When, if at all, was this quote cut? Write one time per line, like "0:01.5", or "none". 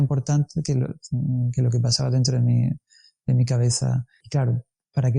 0:04.2